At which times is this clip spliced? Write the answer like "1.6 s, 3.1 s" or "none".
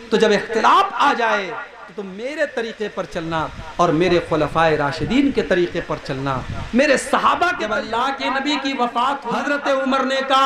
7.8 s, 9.4 s